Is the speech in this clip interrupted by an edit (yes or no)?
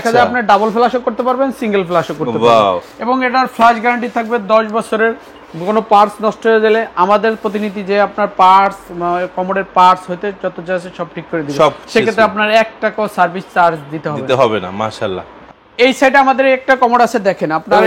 no